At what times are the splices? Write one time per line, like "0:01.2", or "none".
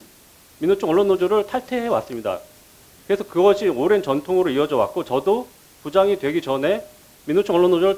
none

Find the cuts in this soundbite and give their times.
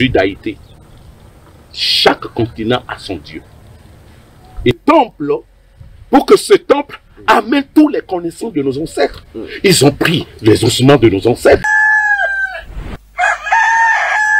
0:04.8
0:11.7

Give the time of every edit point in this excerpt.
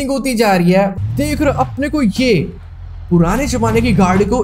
0:01.0

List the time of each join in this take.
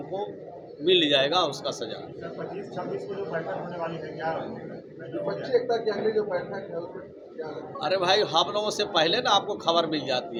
none

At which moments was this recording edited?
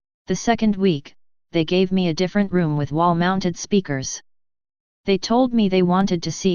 none

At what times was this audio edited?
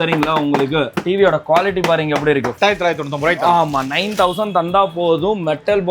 0:00.9
0:02.5

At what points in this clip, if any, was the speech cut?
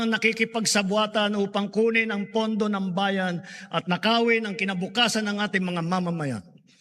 none

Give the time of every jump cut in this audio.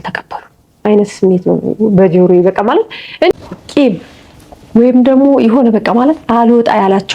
0:03.3

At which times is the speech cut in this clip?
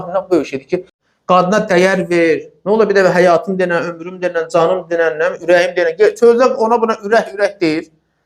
0:00.9

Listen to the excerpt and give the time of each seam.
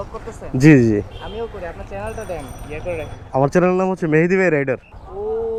none

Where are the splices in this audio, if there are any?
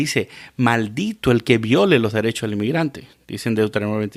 none

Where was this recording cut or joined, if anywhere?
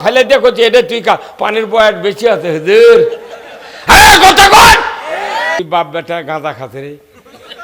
0:05.6

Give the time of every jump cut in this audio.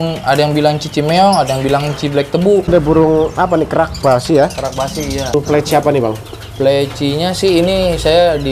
0:02.7
0:05.3

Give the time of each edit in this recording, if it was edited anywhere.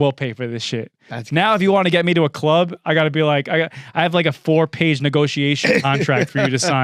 none

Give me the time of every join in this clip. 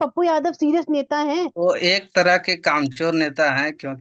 0:01.5

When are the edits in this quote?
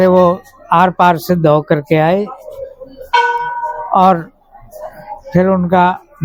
none

